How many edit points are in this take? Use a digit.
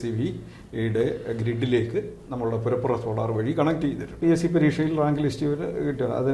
1